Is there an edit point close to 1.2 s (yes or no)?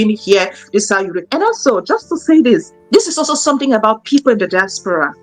yes